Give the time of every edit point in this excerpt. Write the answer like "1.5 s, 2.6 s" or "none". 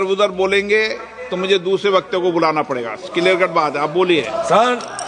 none